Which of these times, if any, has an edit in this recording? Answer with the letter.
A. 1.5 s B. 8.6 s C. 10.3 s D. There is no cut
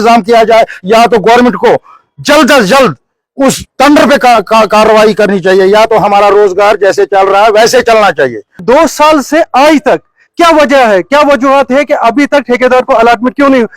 B